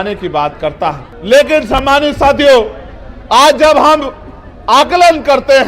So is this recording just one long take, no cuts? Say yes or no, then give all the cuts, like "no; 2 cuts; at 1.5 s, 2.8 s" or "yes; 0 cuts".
no; 1 cut; at 1.1 s